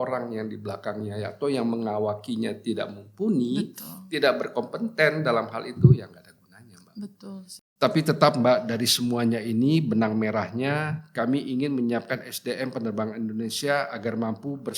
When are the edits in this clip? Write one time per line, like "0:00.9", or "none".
0:07.6